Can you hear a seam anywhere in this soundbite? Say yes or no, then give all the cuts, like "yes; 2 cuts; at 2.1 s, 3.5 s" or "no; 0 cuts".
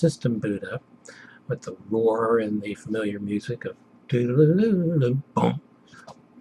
no; 0 cuts